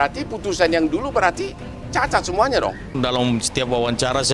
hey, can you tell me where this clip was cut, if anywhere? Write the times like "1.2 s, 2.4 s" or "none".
2.9 s